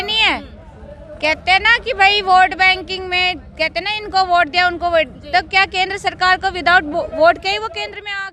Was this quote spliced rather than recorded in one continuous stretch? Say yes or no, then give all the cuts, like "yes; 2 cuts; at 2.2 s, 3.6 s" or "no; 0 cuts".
no; 0 cuts